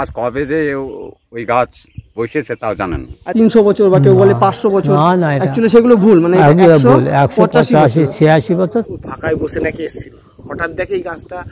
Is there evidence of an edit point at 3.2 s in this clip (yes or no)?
yes